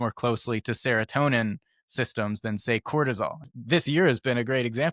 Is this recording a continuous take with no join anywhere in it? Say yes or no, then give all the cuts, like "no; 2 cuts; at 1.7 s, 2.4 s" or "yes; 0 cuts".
no; 1 cut; at 3.5 s